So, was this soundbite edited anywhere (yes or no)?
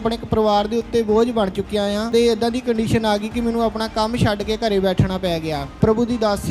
yes